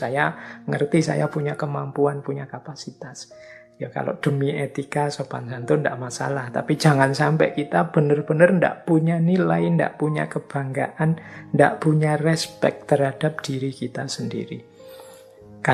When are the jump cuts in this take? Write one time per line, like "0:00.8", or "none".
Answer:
0:12.5